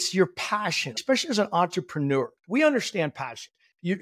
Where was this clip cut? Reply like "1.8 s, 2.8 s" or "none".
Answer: 1.0 s, 2.4 s